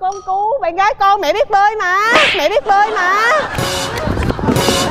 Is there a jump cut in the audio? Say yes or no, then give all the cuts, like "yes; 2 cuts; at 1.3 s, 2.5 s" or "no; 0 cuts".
no; 0 cuts